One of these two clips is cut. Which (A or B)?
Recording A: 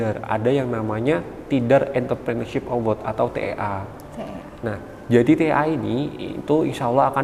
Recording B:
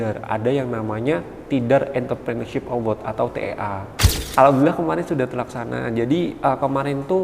B